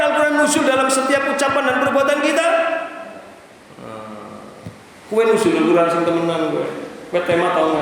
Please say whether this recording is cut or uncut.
uncut